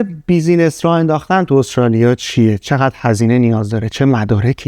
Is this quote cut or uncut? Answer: uncut